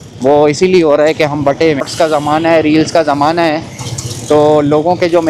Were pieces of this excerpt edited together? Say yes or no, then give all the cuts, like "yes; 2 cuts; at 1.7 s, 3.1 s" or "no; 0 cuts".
yes; 1 cut; at 1.9 s